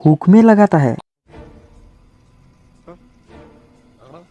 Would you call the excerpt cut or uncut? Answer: uncut